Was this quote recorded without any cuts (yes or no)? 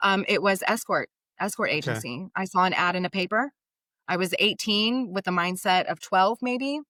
yes